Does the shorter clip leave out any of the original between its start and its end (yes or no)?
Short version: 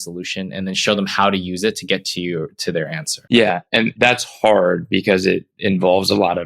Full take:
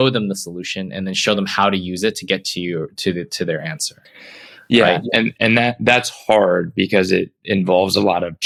yes